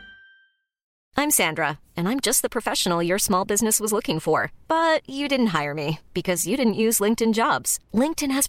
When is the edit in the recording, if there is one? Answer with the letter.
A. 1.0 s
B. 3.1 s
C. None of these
A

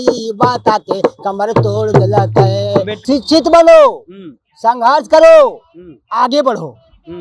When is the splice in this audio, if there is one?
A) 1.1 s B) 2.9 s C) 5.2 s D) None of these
B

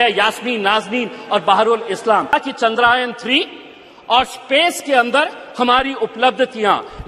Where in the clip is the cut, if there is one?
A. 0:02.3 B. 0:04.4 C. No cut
A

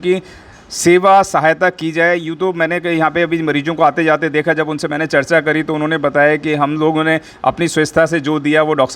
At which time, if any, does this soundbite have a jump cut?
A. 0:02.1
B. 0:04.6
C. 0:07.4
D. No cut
D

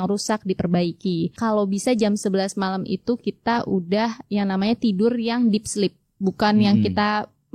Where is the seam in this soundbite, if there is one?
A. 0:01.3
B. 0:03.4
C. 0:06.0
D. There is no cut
A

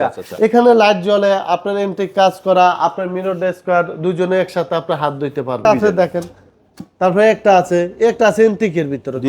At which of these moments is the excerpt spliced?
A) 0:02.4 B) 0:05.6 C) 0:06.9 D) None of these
B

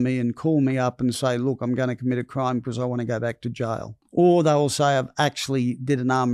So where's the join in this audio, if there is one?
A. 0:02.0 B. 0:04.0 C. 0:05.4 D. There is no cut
B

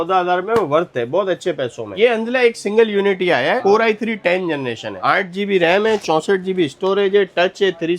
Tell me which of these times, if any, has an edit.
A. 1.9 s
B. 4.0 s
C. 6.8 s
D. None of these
A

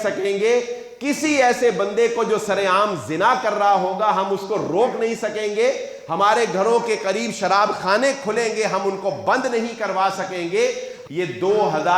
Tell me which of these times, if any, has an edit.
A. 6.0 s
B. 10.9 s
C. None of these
B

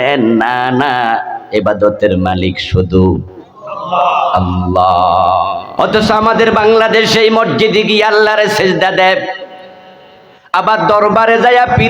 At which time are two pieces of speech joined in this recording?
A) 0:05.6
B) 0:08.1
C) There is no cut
A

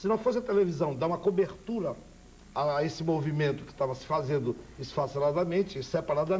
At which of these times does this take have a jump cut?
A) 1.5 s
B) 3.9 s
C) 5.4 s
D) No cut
A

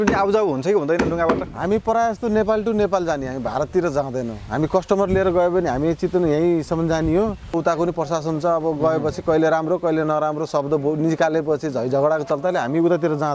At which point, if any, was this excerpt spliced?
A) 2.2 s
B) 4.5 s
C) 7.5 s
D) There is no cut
C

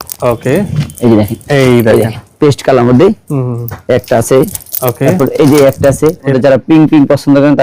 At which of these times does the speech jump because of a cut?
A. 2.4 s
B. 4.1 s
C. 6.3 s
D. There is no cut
C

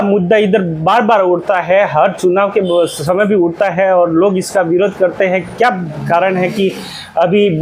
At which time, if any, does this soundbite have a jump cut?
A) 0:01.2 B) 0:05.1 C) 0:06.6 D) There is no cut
D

